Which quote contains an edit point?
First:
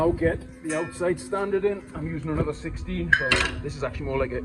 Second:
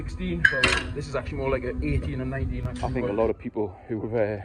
second; 1 cut; at 2.7 s

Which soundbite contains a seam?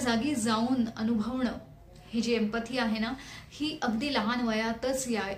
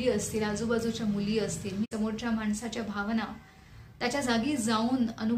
second; 1 cut; at 1.9 s

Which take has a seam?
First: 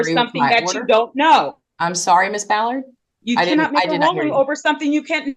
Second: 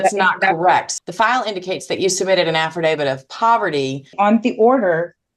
second; 2 cuts; at 0.9 s, 4.1 s

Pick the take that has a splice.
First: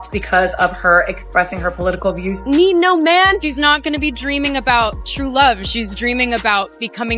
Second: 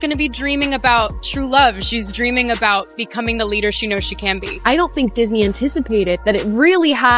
first; 1 cut; at 2.4 s

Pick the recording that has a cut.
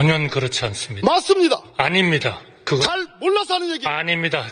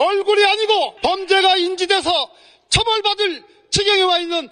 second; 1 cut; at 0.9 s

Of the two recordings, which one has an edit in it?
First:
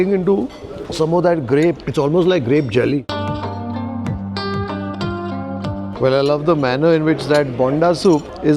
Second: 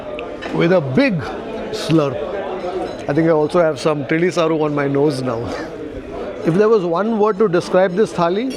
first; 2 cuts; at 1.8 s, 3.1 s

